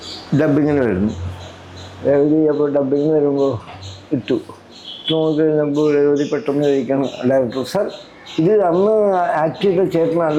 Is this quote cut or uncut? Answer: uncut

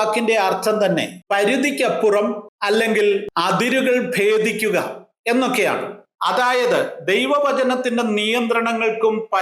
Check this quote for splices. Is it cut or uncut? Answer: cut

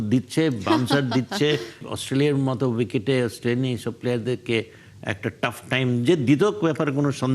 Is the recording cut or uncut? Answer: cut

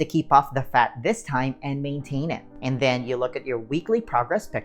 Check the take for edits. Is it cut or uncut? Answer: cut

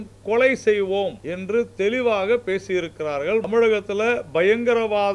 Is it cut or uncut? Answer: cut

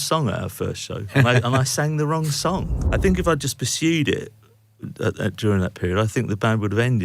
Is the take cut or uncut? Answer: cut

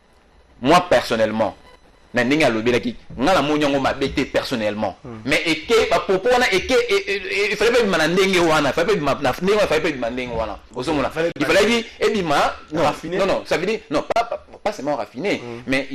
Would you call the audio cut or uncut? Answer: uncut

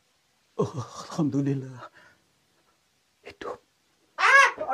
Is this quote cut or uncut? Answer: uncut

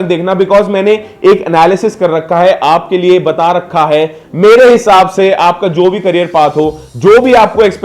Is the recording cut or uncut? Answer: uncut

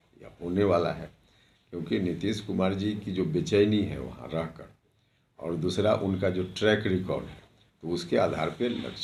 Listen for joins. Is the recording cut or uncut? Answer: uncut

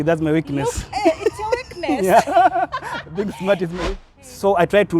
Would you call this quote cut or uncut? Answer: cut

